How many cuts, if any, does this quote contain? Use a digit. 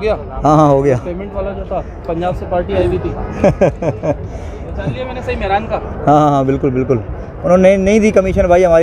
0